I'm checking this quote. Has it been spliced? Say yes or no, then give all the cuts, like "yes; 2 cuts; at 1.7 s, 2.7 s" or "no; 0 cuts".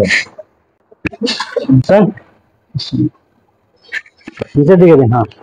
no; 0 cuts